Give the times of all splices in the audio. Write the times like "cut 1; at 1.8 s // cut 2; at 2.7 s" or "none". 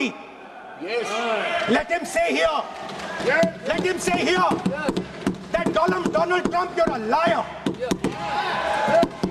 none